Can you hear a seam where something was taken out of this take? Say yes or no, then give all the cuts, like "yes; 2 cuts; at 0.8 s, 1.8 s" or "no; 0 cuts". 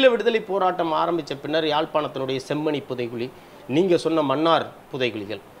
no; 0 cuts